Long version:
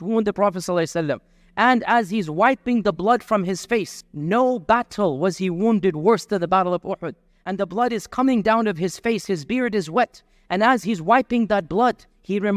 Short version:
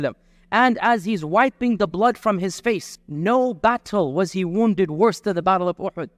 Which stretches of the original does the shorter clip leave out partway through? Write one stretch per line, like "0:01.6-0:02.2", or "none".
none